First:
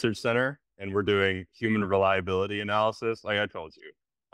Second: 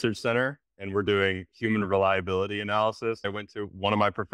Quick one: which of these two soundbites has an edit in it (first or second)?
second